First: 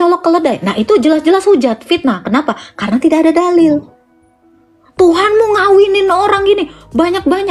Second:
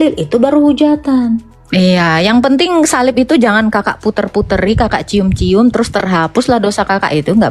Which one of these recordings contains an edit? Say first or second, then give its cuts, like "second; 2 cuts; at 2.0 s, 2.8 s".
second; 1 cut; at 1.6 s